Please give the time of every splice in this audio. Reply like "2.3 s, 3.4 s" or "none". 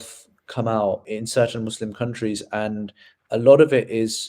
1.1 s